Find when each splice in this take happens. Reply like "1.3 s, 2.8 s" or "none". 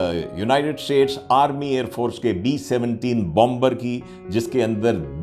none